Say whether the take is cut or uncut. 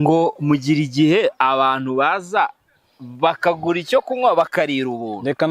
uncut